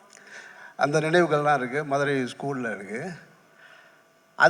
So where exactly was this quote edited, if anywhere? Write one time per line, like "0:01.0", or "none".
none